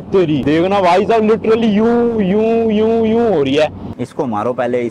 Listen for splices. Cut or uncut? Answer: cut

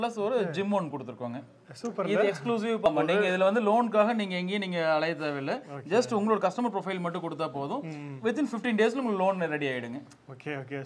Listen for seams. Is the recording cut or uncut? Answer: cut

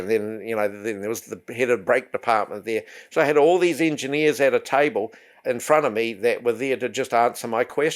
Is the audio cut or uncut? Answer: uncut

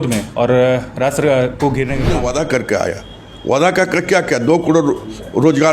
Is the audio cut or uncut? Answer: cut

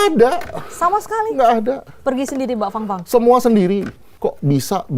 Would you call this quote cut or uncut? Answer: cut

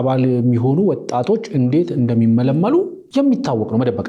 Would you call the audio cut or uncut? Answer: cut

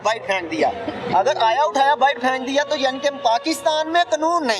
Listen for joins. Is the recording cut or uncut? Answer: uncut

